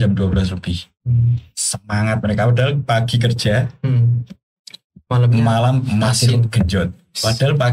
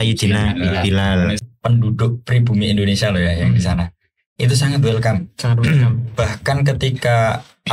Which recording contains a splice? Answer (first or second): second